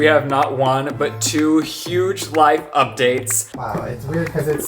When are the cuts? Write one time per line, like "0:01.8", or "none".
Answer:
0:03.4